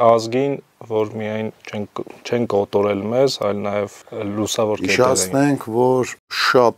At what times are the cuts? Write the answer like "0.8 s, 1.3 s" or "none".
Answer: none